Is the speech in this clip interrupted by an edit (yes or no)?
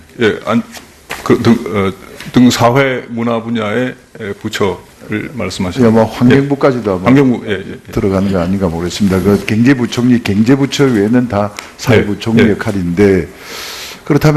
no